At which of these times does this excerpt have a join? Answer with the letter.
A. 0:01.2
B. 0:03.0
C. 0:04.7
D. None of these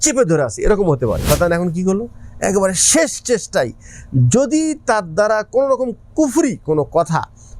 A